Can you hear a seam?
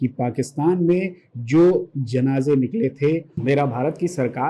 yes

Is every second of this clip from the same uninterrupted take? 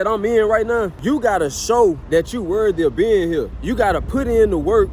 no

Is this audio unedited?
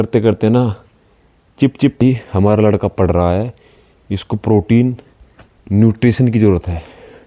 no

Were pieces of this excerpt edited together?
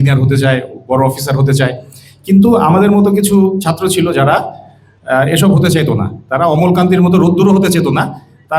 no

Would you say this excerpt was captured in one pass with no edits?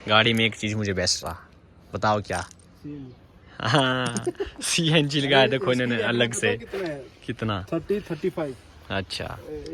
yes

